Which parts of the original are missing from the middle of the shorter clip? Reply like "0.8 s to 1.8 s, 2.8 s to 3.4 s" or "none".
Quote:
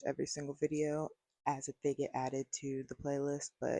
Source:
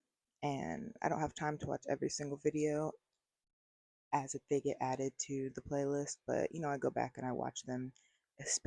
3.1 s to 3.9 s